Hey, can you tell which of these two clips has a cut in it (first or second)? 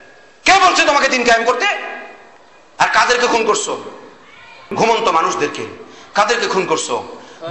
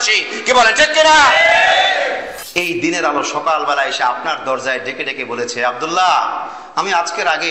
second